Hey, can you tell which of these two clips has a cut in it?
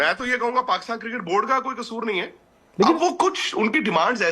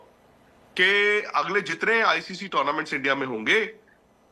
first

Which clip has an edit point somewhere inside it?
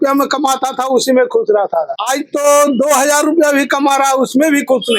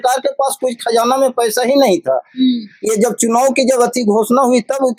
first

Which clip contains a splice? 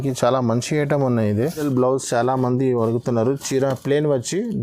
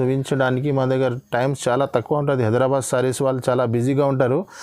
first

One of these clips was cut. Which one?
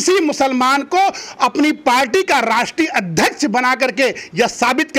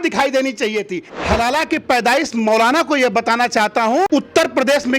second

